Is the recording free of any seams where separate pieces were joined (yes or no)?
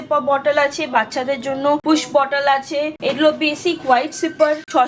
yes